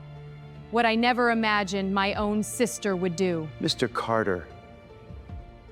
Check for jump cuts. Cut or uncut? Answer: cut